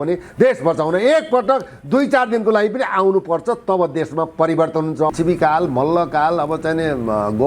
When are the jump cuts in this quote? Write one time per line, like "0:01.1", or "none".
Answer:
0:05.1